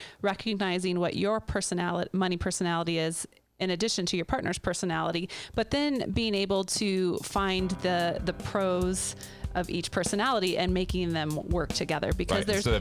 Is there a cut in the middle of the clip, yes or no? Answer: no